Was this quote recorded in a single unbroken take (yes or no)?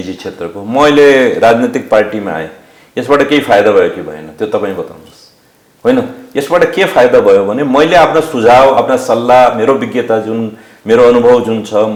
yes